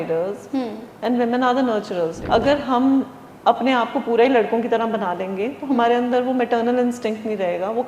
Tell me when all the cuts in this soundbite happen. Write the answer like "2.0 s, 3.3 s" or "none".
2.2 s